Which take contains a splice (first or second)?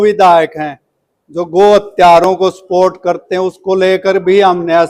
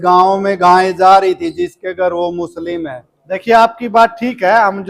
second